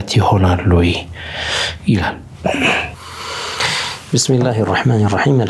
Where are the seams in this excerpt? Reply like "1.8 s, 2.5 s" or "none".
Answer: none